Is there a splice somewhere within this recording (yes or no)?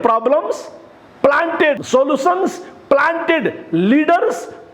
yes